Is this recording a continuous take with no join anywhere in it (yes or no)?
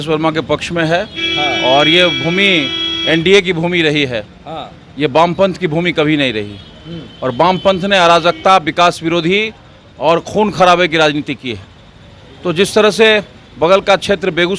yes